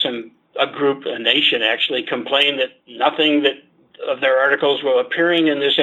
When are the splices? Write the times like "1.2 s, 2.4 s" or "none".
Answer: none